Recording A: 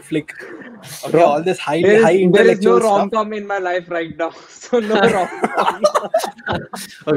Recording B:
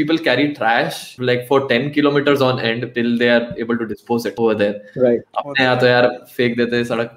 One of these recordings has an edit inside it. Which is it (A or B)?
B